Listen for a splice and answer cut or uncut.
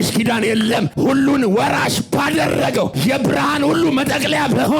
cut